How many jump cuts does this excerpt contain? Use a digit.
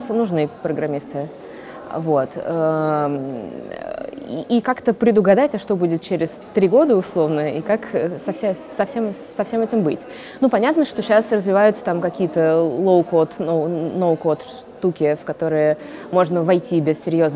0